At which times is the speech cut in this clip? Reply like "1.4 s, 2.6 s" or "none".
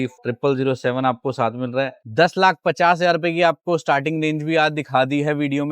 2.0 s